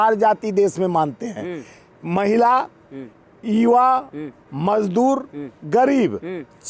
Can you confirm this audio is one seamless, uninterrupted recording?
yes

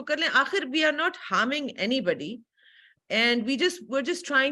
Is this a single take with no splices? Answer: yes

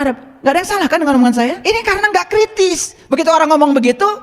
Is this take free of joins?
no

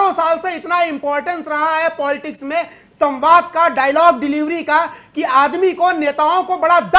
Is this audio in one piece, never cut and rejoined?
yes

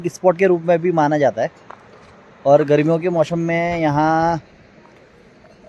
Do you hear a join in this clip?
no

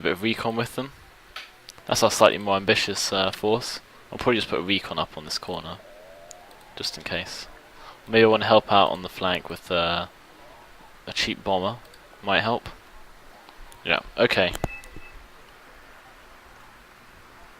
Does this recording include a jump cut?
yes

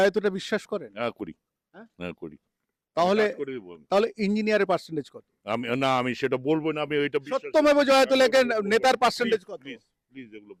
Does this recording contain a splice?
no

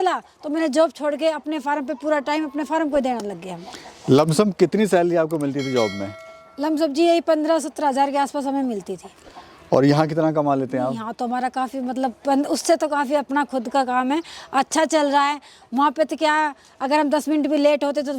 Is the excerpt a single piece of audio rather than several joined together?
yes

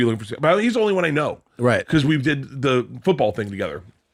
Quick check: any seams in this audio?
no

